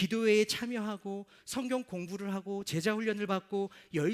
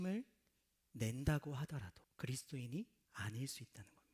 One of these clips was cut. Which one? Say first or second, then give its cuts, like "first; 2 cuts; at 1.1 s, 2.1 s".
second; 2 cuts; at 2.0 s, 3.0 s